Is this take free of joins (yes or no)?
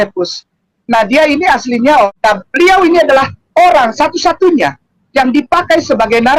no